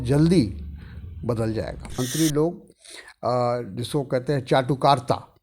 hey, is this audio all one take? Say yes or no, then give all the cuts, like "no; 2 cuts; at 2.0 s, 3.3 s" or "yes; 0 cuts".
no; 1 cut; at 2.0 s